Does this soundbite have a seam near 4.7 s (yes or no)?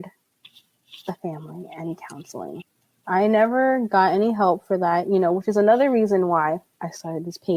no